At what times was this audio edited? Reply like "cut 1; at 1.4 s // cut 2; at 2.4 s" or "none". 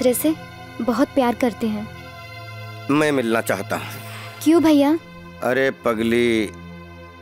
none

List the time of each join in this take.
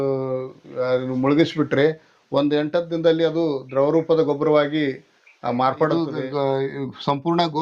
cut 1; at 6.2 s

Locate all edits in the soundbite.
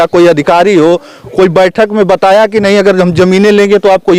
none

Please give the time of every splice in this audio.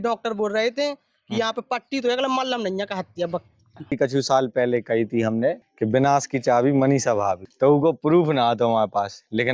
cut 1; at 3.7 s // cut 2; at 5.7 s // cut 3; at 7.5 s

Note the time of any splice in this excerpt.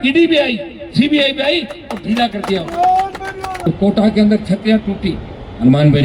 cut 1; at 3.7 s

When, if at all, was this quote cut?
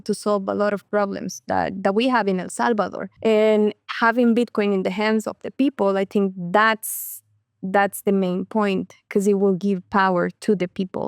cut 1; at 3.0 s

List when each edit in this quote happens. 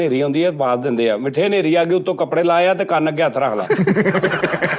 none

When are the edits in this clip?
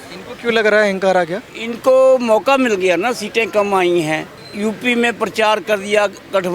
cut 1; at 4.4 s

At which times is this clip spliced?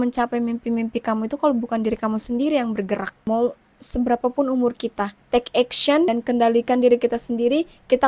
cut 1; at 3.1 s // cut 2; at 5.1 s // cut 3; at 6.1 s

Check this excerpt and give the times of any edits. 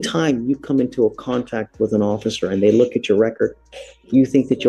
none

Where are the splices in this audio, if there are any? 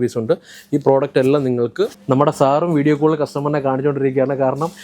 cut 1; at 2.0 s

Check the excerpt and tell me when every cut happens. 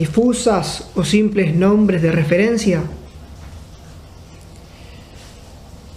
none

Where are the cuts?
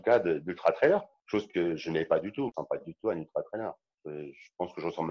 cut 1; at 1.1 s // cut 2; at 2.5 s // cut 3; at 3.9 s

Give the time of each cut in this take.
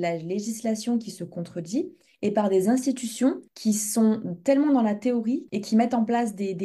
cut 1; at 3.5 s // cut 2; at 5.5 s

